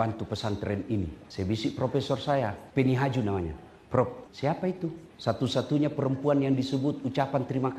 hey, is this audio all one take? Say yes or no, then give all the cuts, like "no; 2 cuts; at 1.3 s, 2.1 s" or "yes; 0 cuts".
no; 4 cuts; at 1.2 s, 2.6 s, 4.2 s, 5.1 s